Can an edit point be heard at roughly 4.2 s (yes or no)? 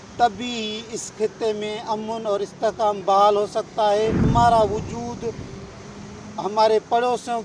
yes